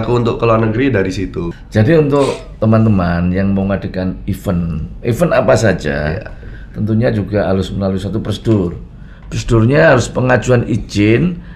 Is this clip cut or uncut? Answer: cut